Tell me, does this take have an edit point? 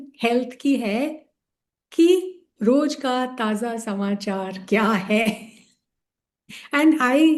no; 0 cuts

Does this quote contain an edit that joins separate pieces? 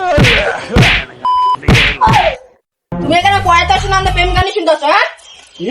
yes; 1 cut; at 2.9 s

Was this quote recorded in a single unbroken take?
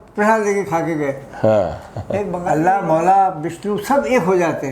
no; 1 cut; at 2.3 s

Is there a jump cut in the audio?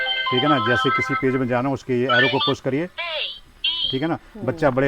no; 0 cuts

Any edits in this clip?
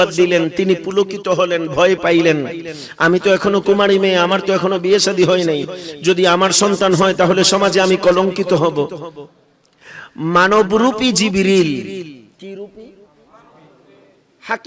no; 0 cuts

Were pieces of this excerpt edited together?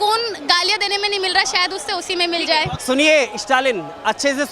yes; 1 cut; at 2.8 s

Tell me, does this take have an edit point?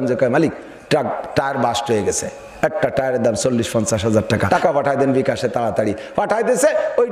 yes; 1 cut; at 4.4 s

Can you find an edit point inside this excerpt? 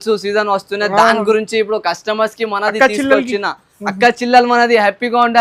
no; 0 cuts

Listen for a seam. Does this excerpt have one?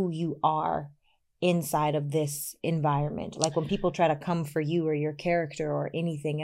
no; 0 cuts

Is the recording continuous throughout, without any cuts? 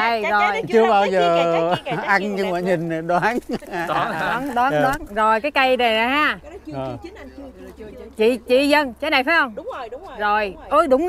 yes; 0 cuts

